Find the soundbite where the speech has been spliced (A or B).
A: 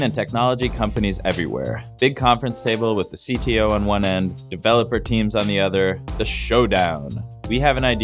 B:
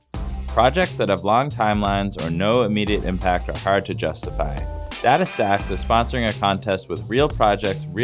A